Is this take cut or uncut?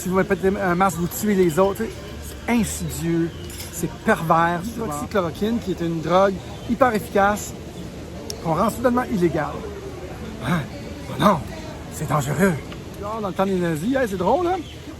cut